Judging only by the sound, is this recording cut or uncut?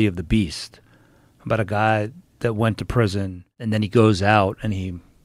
cut